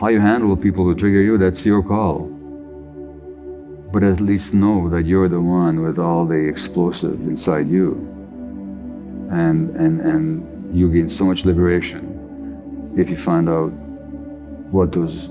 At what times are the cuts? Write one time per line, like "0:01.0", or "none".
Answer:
none